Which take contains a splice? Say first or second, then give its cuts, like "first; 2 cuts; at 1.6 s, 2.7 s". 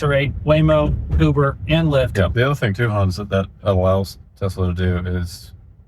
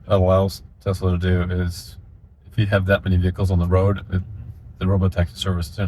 first; 1 cut; at 2.3 s